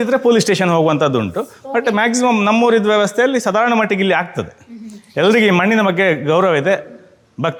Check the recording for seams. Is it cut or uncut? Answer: uncut